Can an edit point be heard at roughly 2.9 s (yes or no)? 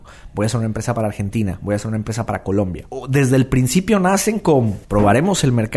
yes